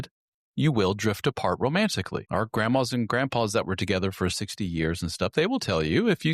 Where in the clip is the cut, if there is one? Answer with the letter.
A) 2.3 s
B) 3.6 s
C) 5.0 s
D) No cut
A